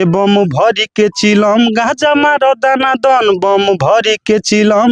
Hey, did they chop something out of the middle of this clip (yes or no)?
no